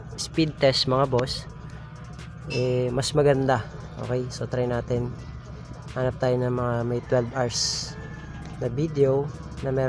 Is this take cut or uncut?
uncut